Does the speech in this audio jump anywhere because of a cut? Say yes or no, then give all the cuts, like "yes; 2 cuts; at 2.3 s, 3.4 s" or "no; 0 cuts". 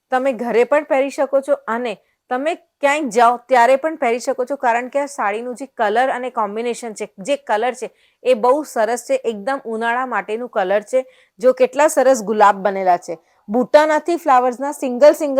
no; 0 cuts